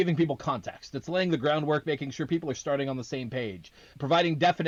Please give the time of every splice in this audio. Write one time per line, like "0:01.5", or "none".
none